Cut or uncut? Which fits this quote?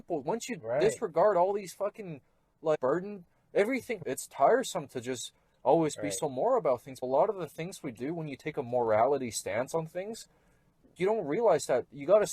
cut